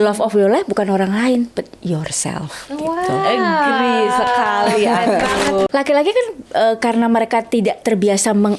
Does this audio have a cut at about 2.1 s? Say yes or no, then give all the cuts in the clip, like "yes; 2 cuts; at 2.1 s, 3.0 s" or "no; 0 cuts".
no; 1 cut; at 5.7 s